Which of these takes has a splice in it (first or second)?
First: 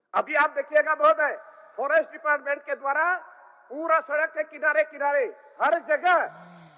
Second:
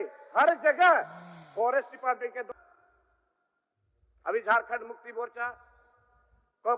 second